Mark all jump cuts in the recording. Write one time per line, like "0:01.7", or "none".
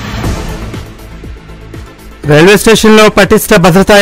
0:02.1